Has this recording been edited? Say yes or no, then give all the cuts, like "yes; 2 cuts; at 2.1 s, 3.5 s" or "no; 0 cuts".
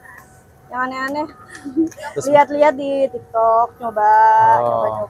no; 0 cuts